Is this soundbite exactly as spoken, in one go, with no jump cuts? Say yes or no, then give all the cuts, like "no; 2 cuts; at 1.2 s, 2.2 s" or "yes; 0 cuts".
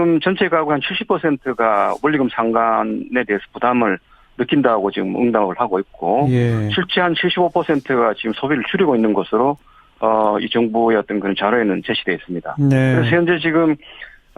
yes; 0 cuts